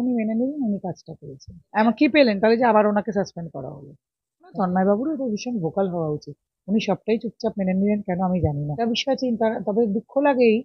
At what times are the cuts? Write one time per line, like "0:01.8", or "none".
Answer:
0:01.5
0:04.5
0:08.8